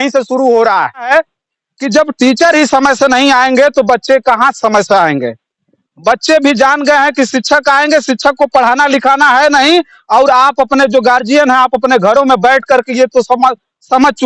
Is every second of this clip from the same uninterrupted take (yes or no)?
no